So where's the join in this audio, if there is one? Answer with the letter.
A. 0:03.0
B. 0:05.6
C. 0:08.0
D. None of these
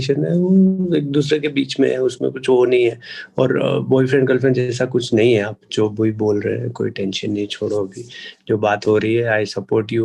D